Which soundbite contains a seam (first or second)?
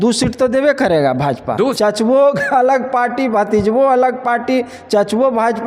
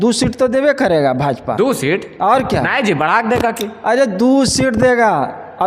first